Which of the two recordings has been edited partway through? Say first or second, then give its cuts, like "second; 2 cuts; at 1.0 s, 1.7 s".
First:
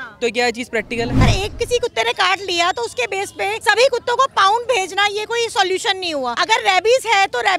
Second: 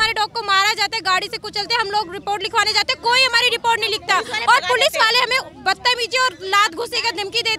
first; 3 cuts; at 1.2 s, 3.6 s, 6.3 s